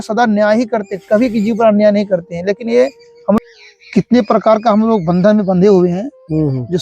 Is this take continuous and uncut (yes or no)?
no